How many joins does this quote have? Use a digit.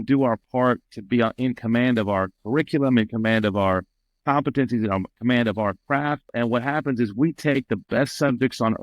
1